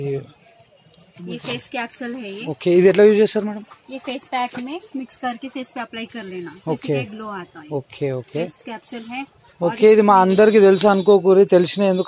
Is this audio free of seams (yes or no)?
no